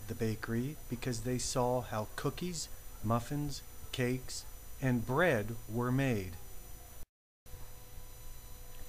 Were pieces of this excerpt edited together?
yes; 1 cut; at 7.0 s

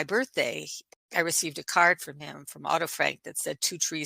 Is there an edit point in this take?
yes; 1 cut; at 0.9 s

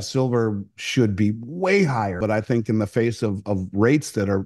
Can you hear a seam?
yes; 1 cut; at 2.2 s

